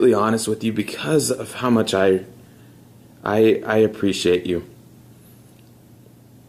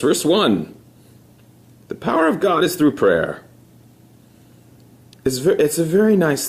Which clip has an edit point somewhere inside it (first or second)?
second